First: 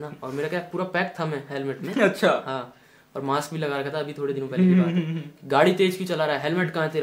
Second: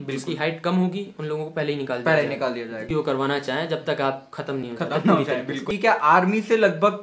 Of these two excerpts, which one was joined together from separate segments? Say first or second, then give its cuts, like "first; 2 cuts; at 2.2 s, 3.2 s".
second; 2 cuts; at 2.9 s, 5.7 s